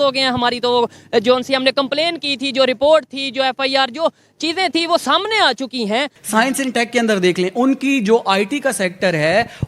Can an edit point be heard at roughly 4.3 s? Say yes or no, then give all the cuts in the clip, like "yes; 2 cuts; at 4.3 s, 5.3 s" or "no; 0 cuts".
no; 1 cut; at 6.2 s